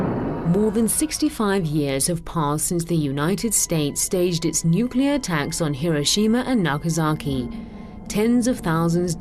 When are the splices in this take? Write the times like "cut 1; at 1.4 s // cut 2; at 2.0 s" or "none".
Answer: none